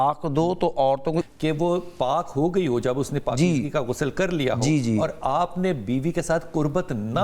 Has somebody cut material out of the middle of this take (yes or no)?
yes